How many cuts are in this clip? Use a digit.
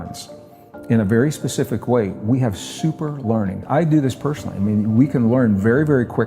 1